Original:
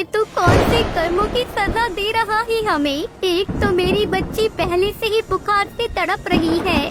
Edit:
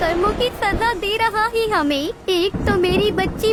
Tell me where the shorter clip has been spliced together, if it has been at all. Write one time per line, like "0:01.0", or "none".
none